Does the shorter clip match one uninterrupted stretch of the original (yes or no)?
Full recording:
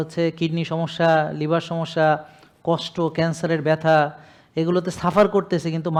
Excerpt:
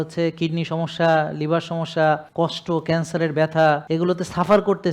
no